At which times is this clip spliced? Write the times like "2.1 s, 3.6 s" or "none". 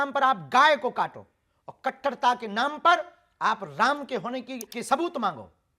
4.7 s